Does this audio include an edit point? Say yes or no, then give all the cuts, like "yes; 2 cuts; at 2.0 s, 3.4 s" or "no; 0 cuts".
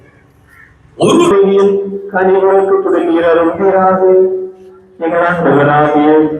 yes; 1 cut; at 1.3 s